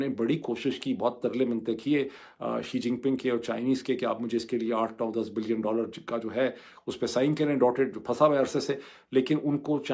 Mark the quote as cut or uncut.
uncut